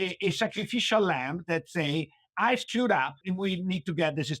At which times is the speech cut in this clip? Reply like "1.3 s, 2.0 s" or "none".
3.2 s